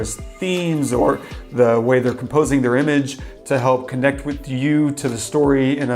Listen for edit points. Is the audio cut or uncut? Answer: uncut